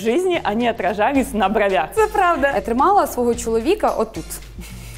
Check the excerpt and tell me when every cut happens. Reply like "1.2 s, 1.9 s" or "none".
2.6 s

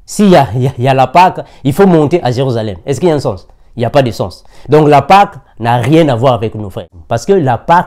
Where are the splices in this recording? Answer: 6.9 s

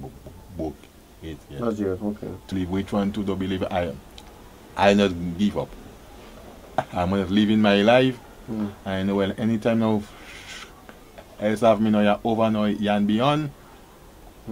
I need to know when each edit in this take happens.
2.5 s

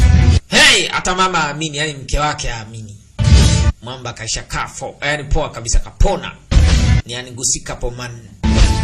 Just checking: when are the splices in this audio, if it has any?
none

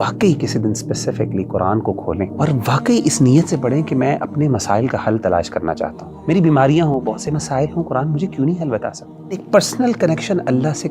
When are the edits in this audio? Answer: 2.3 s, 6.1 s, 9.4 s

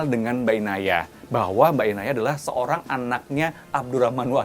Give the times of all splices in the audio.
none

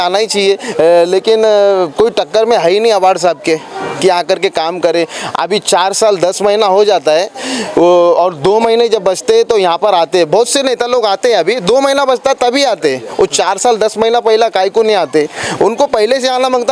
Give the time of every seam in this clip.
none

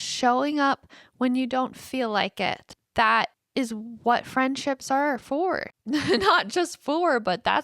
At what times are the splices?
2.7 s, 3.4 s, 5.7 s

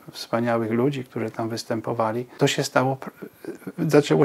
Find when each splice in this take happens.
2.3 s

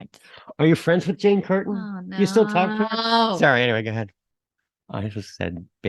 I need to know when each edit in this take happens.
4.1 s

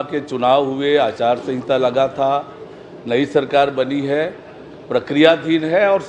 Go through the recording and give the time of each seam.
none

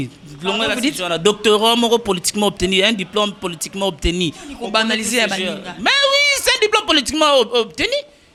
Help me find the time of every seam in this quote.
none

